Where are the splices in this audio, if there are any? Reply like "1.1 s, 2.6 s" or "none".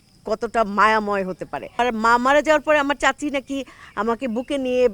1.8 s